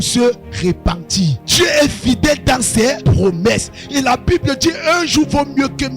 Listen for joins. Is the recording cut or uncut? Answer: cut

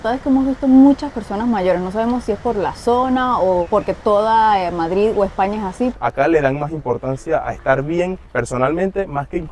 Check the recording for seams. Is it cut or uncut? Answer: cut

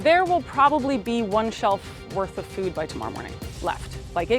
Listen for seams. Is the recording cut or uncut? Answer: uncut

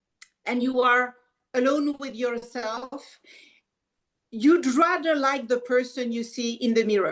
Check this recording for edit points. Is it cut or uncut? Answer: uncut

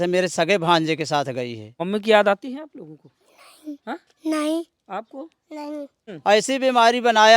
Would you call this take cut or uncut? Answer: cut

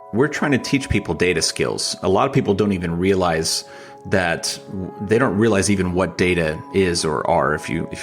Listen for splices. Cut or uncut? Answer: uncut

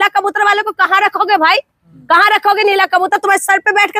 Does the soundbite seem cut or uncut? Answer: uncut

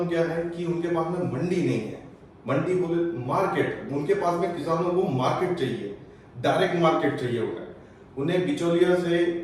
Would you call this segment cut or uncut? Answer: uncut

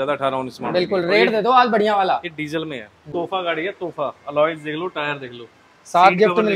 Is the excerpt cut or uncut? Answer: cut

